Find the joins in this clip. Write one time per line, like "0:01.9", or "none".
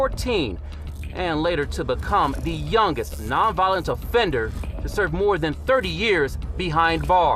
none